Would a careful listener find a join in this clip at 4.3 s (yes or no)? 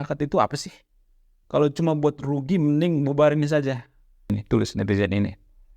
yes